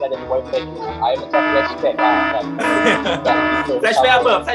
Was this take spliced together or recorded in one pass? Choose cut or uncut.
uncut